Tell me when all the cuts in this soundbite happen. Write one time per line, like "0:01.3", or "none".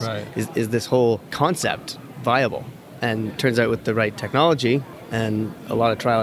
0:01.3
0:05.2

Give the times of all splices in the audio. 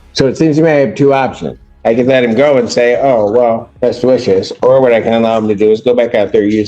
0:03.7

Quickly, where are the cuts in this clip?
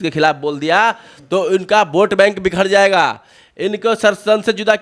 none

